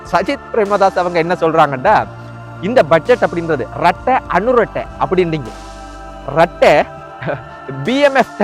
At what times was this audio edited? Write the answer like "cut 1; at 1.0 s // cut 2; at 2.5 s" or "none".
none